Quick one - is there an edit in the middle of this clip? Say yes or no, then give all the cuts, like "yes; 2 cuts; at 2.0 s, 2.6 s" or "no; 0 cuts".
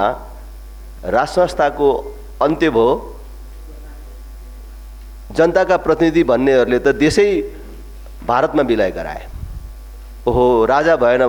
no; 0 cuts